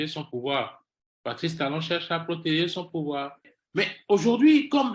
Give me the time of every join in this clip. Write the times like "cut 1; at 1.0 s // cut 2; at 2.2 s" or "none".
cut 1; at 3.6 s